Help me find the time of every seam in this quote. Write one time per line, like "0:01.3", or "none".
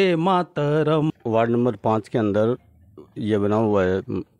0:01.1